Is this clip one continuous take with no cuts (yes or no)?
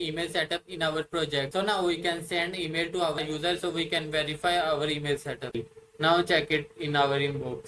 no